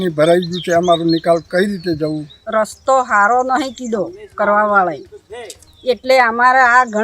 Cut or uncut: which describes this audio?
cut